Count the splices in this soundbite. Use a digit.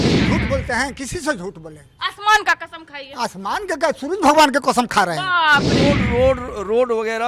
1